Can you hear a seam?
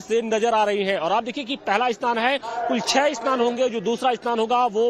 no; 0 cuts

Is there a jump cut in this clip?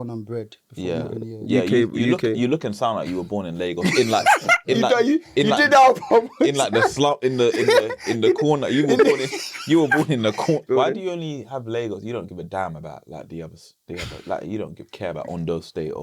yes; 1 cut; at 10.6 s

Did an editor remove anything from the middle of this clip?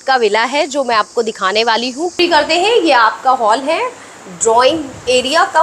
yes; 1 cut; at 2.2 s

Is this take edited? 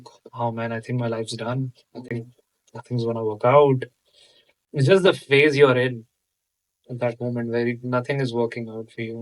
no; 0 cuts

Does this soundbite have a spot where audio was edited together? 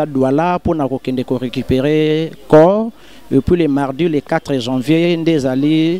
no; 0 cuts

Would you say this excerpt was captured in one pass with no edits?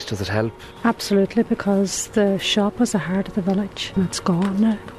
no; 1 cut; at 3.8 s

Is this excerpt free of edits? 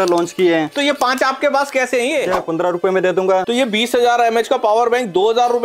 no; 2 cuts; at 2.4 s, 3.5 s

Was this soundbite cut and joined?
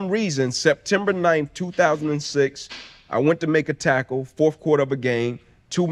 no; 0 cuts

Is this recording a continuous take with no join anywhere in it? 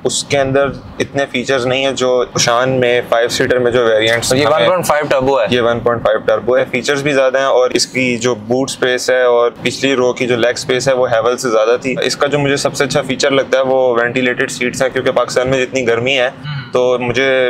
no; 5 cuts; at 2.4 s, 6.6 s, 7.7 s, 9.5 s, 12.0 s

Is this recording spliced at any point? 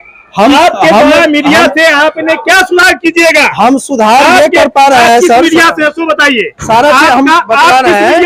no; 0 cuts

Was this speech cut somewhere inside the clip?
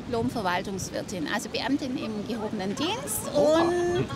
no; 0 cuts

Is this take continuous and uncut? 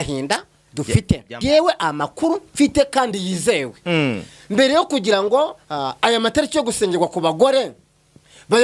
no; 1 cut; at 1.4 s

